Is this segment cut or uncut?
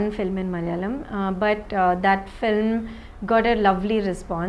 uncut